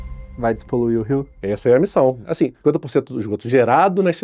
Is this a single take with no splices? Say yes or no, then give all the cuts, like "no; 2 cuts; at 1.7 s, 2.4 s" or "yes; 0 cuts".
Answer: no; 2 cuts; at 1.3 s, 2.3 s